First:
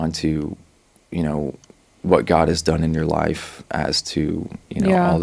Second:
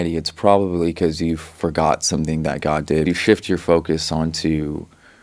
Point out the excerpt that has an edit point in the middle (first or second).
second